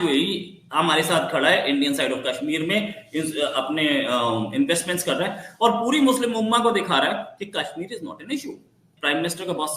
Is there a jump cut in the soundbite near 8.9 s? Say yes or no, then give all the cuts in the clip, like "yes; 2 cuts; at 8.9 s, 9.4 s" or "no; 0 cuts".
yes; 1 cut; at 8.9 s